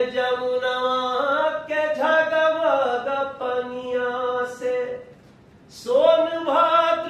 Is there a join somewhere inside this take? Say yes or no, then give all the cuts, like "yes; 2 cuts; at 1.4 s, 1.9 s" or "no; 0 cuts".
no; 0 cuts